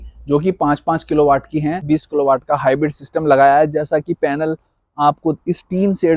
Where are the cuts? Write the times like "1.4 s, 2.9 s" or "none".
1.8 s